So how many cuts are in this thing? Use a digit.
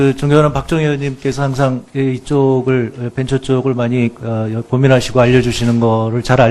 1